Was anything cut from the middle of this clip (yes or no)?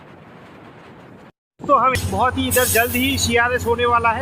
yes